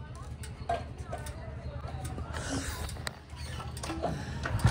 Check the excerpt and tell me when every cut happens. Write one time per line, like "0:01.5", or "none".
none